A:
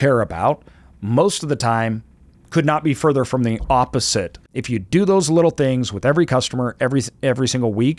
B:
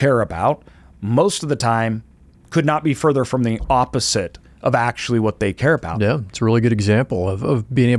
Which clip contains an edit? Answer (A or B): A